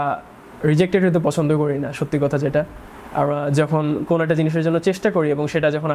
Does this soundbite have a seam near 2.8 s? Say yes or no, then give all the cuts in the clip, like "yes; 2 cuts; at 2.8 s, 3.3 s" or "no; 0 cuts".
no; 0 cuts